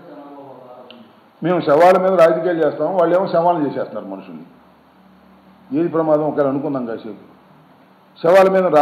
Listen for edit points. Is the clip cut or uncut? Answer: cut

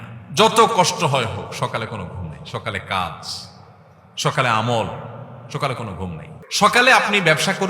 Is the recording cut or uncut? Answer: cut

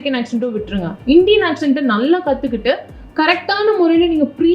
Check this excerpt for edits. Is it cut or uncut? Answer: uncut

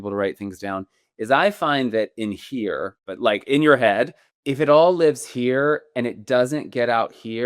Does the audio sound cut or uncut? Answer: cut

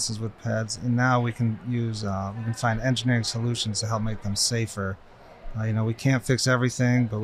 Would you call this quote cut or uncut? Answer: uncut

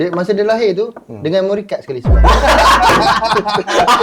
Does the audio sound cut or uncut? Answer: uncut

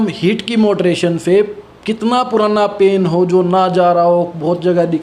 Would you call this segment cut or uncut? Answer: uncut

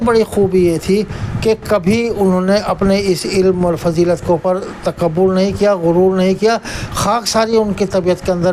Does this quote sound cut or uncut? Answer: uncut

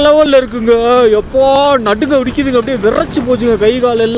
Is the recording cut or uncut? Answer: uncut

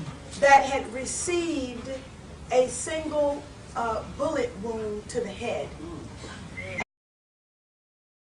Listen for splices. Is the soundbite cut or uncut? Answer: uncut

